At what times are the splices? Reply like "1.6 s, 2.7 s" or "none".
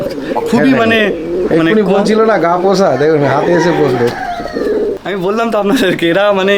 4.9 s